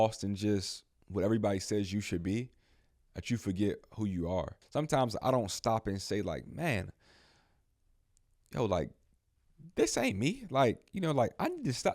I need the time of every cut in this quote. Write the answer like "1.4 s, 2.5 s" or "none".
4.6 s